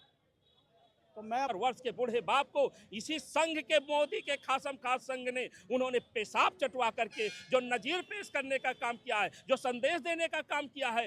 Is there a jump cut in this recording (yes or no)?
yes